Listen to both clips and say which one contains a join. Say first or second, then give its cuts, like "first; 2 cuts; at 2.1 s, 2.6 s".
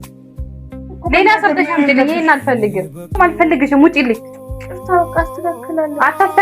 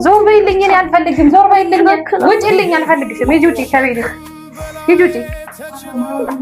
first; 1 cut; at 3.2 s